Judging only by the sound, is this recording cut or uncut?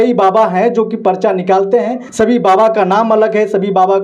cut